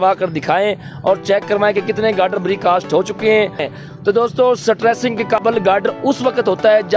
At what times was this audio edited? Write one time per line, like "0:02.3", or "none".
0:03.7